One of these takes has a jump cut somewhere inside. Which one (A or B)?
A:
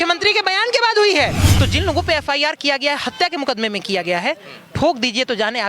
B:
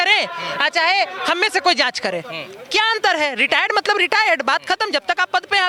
A